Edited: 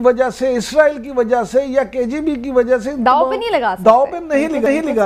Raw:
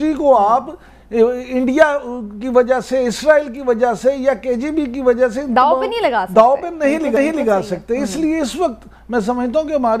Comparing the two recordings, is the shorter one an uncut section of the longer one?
yes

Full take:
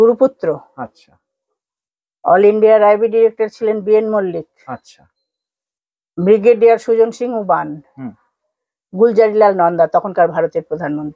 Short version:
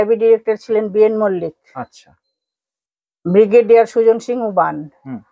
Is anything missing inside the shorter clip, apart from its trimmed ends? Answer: no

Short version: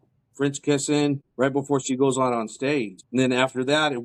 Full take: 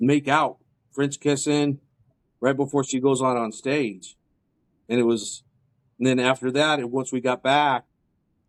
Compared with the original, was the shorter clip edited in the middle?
yes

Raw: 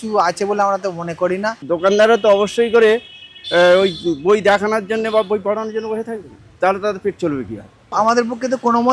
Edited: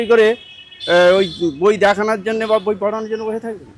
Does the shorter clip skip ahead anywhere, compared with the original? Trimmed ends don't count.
no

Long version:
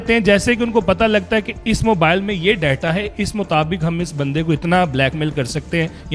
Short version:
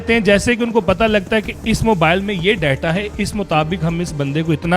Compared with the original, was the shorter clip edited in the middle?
no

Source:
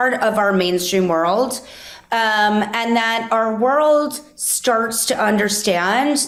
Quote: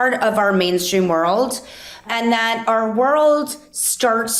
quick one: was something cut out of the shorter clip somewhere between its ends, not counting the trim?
yes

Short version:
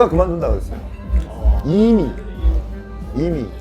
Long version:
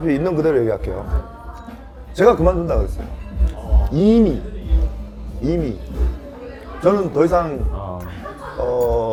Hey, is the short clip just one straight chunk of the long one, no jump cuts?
yes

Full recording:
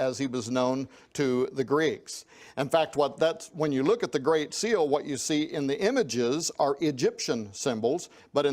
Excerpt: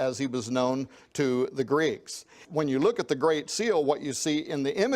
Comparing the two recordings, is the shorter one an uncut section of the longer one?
no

